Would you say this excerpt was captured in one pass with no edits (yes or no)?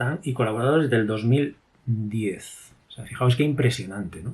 no